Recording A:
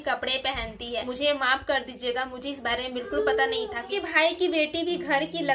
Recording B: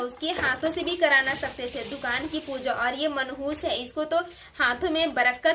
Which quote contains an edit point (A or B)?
A